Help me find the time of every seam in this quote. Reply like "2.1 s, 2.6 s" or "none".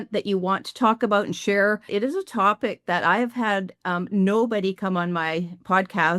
1.9 s